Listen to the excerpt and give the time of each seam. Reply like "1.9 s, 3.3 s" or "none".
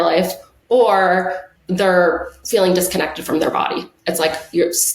1.4 s